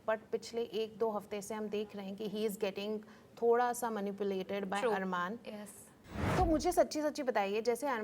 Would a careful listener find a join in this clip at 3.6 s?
no; 1 cut; at 6.1 s

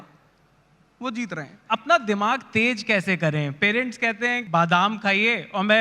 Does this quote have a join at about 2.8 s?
no; 2 cuts; at 1.6 s, 4.4 s

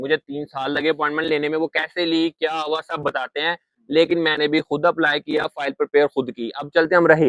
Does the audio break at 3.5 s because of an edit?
no; 0 cuts

